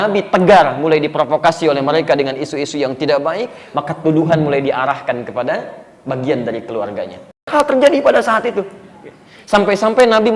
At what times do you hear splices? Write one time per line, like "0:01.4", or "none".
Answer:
0:07.5